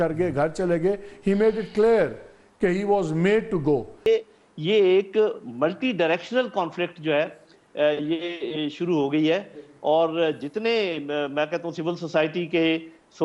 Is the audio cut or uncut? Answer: cut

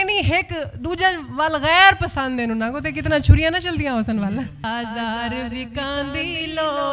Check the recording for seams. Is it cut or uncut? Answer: cut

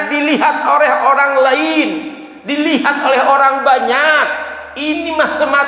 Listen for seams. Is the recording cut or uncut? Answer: uncut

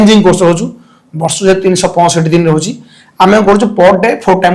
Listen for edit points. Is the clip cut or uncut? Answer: uncut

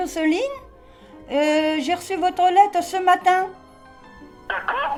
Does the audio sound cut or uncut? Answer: uncut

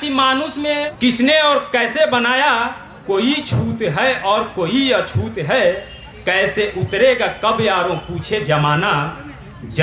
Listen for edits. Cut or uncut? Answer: cut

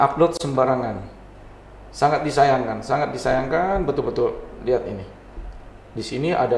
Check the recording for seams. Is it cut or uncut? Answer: uncut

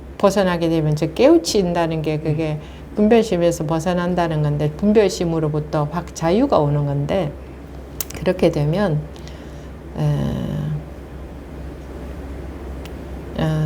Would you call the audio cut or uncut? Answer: uncut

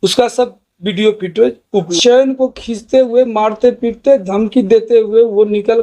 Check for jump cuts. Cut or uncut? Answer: cut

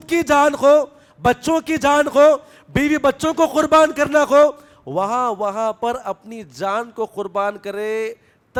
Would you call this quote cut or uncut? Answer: uncut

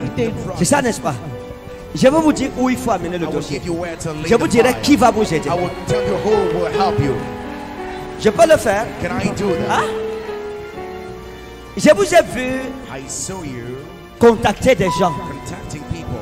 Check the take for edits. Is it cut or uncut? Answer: uncut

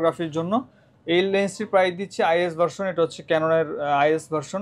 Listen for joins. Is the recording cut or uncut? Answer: uncut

